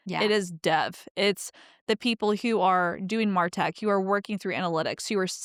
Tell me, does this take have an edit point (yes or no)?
no